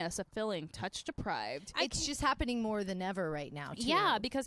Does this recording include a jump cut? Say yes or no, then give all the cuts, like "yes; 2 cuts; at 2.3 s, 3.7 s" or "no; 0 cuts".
no; 0 cuts